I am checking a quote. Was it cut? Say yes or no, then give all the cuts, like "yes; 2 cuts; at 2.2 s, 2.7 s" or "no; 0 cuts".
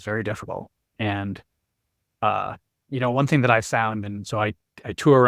no; 0 cuts